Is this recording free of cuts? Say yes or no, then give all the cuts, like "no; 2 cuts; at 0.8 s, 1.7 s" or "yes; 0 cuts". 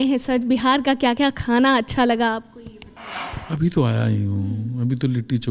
yes; 0 cuts